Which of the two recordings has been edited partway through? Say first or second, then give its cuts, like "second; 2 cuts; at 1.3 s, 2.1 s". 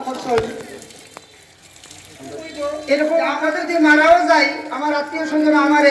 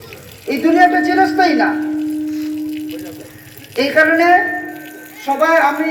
first; 1 cut; at 3.4 s